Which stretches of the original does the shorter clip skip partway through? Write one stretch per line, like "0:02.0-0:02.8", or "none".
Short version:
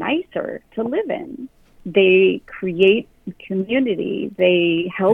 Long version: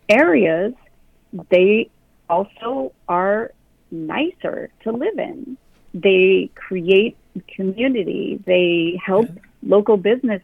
none